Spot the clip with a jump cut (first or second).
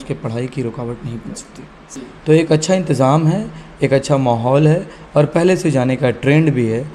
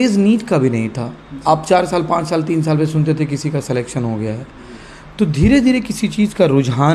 first